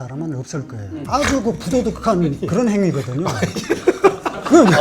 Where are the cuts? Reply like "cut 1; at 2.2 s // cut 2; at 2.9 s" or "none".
cut 1; at 1.0 s